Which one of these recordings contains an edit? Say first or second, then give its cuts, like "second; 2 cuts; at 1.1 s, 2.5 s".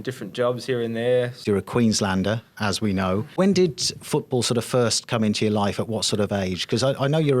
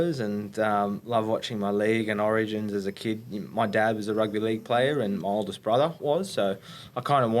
first; 2 cuts; at 1.4 s, 3.3 s